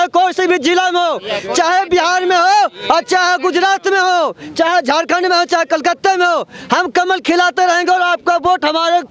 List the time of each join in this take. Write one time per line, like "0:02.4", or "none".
none